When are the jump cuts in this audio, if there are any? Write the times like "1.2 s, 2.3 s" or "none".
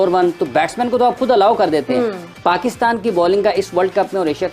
2.3 s